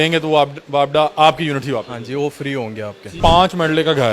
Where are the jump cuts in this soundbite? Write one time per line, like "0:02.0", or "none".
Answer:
0:03.2